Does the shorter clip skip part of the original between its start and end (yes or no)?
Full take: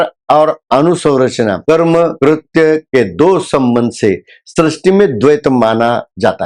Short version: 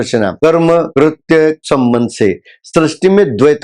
yes